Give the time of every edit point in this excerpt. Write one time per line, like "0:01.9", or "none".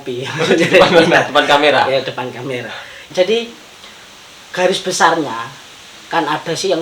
0:03.1